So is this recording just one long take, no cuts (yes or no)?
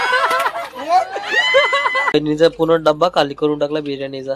no